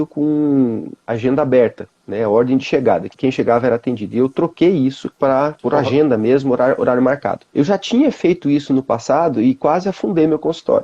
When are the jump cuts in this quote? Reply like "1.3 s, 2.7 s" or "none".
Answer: 3.1 s